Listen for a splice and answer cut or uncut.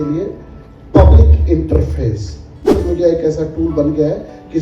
cut